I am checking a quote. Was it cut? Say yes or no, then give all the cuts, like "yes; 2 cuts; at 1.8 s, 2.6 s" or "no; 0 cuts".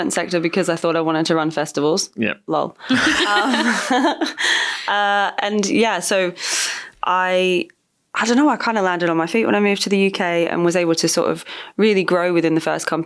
no; 0 cuts